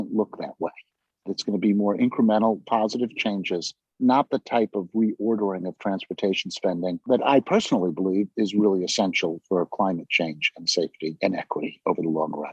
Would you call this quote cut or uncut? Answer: cut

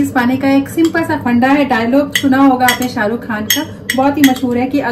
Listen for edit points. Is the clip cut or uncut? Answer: uncut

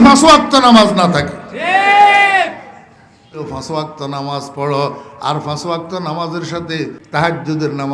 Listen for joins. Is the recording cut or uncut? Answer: cut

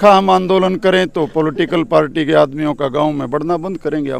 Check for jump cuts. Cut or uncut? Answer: uncut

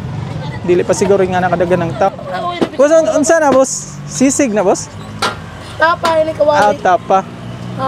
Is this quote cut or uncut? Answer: cut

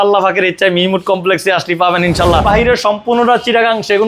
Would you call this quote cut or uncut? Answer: cut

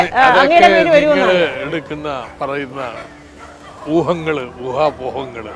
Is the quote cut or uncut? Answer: uncut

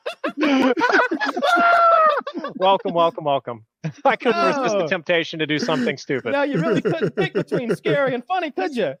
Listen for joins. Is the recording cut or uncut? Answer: uncut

